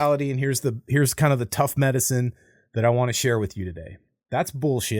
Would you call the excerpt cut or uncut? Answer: uncut